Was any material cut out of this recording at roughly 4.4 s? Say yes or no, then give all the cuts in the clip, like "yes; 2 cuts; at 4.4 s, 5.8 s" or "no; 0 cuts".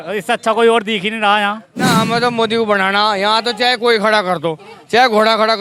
no; 1 cut; at 1.7 s